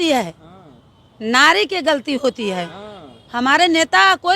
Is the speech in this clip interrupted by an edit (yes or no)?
no